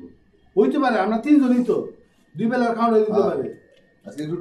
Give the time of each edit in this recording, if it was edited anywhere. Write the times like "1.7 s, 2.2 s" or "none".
none